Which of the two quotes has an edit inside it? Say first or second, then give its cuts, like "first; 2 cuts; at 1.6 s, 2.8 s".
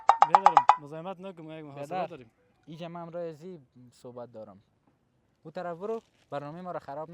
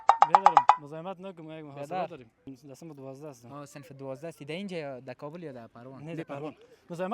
second; 1 cut; at 2.5 s